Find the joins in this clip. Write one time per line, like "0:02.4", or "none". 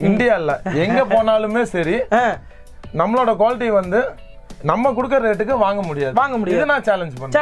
none